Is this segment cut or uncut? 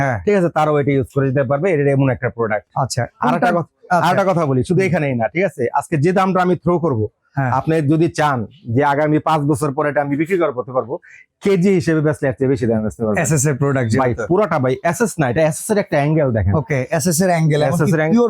uncut